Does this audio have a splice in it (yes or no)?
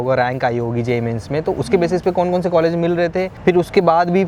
no